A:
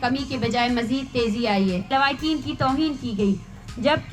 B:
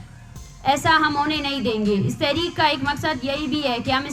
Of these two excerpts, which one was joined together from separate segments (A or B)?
A